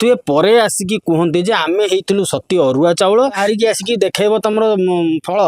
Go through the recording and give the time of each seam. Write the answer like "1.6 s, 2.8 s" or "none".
3.4 s